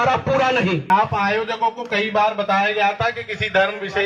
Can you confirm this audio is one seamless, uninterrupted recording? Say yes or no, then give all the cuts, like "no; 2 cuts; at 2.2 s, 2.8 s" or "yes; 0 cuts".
no; 1 cut; at 0.9 s